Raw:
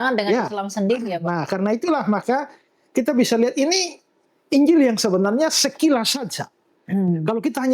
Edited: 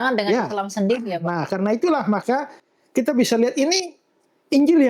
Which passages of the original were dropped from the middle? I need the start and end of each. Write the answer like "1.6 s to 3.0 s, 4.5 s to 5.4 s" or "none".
none